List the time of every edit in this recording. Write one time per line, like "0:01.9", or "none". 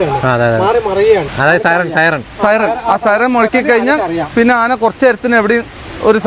0:01.3